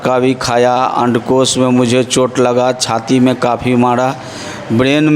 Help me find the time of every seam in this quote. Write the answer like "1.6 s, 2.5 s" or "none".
none